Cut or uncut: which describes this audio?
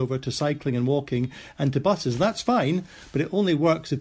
uncut